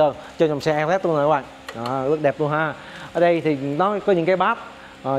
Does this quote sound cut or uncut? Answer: uncut